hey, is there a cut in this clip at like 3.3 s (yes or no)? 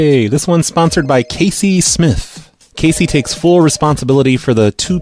no